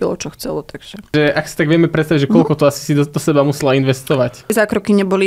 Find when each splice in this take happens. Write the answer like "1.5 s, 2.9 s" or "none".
1.1 s, 4.5 s